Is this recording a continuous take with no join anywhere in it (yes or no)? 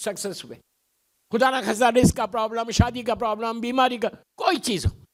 yes